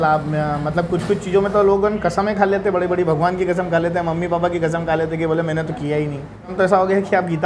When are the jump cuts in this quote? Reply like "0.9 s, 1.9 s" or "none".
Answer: 6.5 s

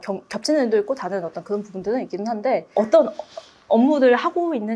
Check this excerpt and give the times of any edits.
2.7 s

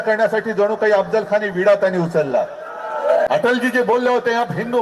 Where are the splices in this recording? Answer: 3.3 s

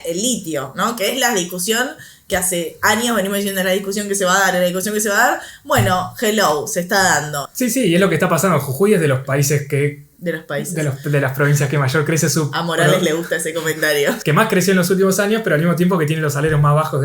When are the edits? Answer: 7.4 s, 14.2 s

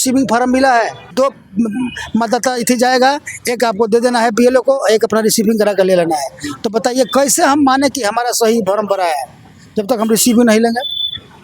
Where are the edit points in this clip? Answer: 1.1 s

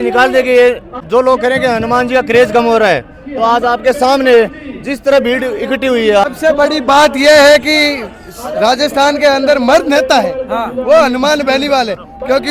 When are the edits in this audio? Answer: 0.9 s, 6.2 s

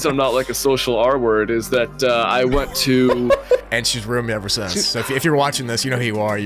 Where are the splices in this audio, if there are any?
3.6 s

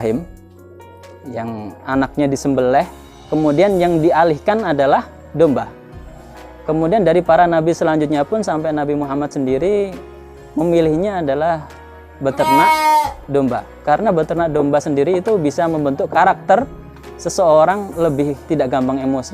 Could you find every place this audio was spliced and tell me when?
16.1 s, 18.4 s

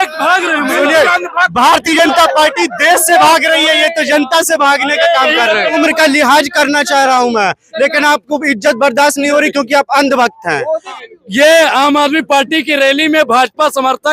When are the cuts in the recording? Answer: 5.8 s, 10.9 s

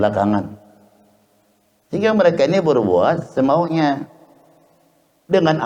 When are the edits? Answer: none

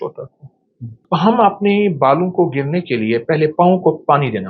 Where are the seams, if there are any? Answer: 1.0 s

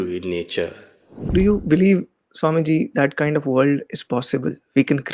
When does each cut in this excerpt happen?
1.3 s

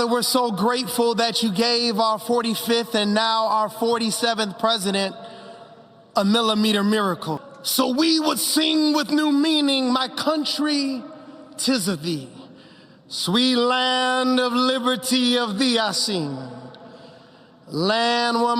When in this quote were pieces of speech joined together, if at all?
7.5 s

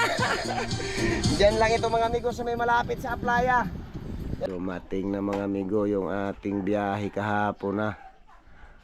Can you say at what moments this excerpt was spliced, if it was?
4.5 s

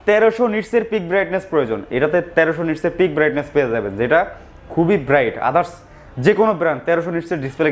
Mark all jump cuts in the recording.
none

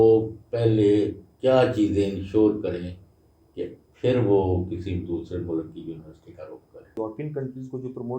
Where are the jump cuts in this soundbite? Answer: 7.0 s

